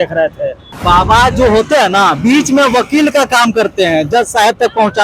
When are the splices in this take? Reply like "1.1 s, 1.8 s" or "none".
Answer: none